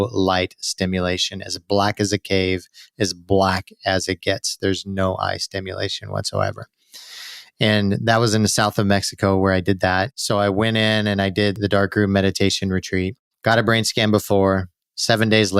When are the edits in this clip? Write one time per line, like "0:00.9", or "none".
0:10.1